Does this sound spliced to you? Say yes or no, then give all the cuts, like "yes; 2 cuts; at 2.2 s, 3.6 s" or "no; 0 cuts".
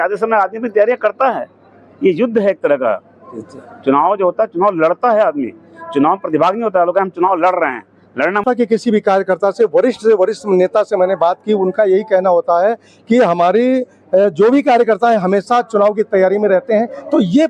yes; 1 cut; at 8.4 s